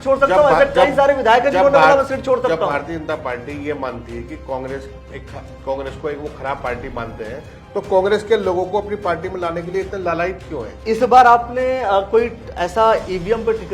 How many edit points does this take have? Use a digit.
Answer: 1